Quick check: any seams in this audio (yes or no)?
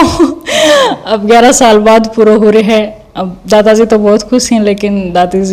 no